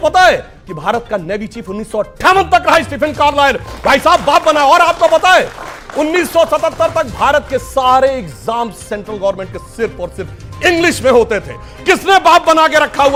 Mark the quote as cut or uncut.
uncut